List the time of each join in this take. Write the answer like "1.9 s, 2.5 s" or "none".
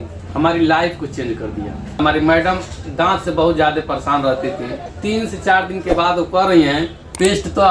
2.0 s, 4.9 s